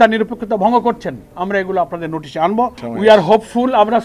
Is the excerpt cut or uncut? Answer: cut